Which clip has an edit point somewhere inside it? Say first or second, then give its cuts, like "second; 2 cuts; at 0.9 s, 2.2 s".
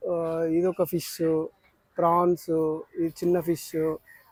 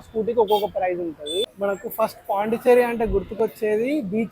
second; 1 cut; at 1.5 s